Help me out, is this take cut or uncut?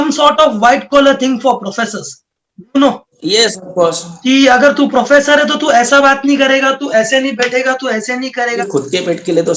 cut